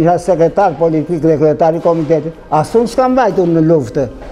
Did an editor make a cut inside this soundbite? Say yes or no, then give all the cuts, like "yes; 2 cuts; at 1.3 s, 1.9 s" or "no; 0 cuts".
no; 0 cuts